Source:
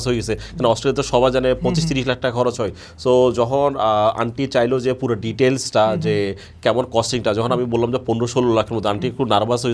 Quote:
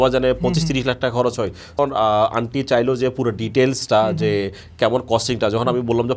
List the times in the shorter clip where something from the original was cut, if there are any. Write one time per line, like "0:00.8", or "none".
0:01.8